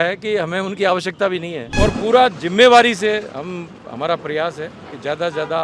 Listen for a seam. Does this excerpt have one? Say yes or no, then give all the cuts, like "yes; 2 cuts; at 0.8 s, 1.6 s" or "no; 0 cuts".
yes; 1 cut; at 1.6 s